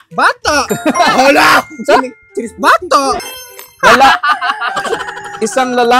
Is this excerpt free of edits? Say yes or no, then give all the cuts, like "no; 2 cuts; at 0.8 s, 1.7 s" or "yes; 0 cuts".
no; 1 cut; at 3.3 s